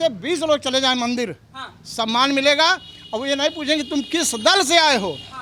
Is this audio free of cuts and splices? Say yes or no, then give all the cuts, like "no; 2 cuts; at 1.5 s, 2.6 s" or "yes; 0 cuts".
yes; 0 cuts